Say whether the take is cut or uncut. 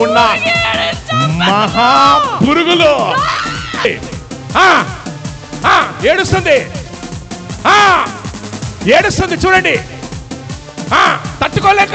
cut